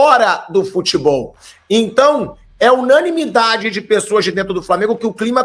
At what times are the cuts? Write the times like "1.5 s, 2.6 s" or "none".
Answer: none

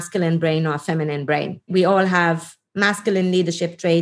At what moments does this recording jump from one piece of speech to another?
1.7 s

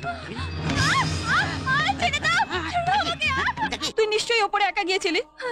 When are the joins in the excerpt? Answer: 3.8 s

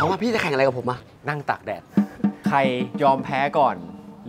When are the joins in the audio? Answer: 1.1 s, 2.9 s

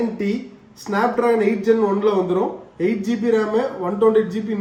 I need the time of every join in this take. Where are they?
none

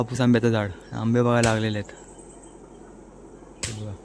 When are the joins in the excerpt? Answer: none

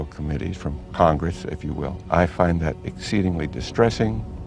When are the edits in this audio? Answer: 2.1 s

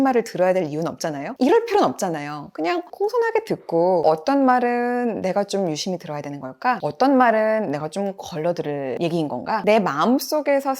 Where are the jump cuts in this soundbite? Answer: 9.6 s

